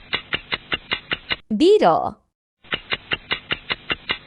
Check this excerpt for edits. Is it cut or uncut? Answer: uncut